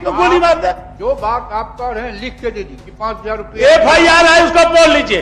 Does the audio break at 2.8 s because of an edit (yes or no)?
yes